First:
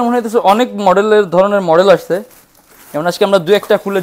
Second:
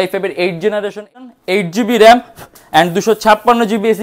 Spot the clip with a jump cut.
second; 1 cut; at 1.3 s

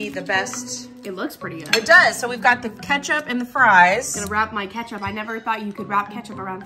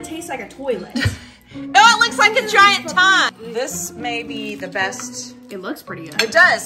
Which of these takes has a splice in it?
second; 1 cut; at 3.4 s

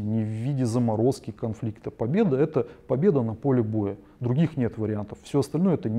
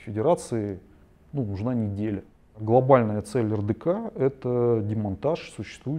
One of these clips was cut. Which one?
second; 1 cut; at 2.4 s

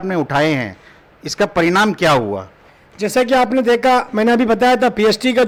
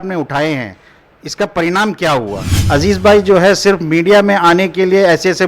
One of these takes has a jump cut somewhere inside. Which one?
second; 1 cut; at 2.6 s

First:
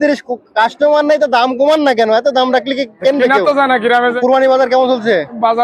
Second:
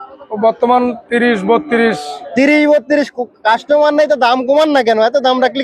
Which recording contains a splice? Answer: first; 1 cut; at 4.2 s

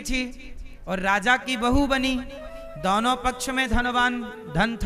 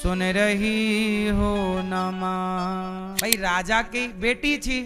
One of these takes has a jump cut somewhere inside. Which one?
second; 1 cut; at 3.1 s

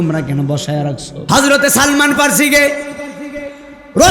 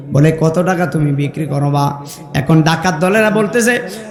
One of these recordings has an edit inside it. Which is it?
first; 1 cut; at 1.1 s

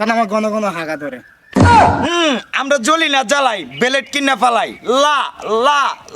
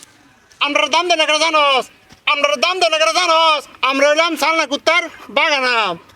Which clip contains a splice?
first; 2 cuts; at 1.3 s, 2.0 s

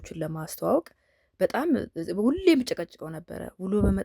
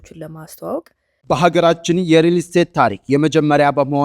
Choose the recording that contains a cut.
second; 1 cut; at 1.1 s

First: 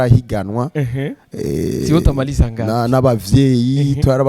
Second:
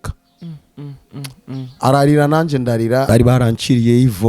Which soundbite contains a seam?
second; 1 cut; at 3.1 s

